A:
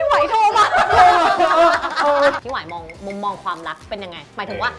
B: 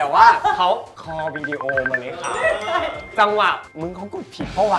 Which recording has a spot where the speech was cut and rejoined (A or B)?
A